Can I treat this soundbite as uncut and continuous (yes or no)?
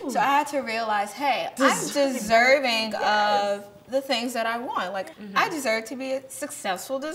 no